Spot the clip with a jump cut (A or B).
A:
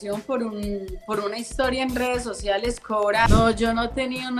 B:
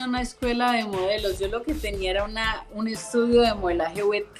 A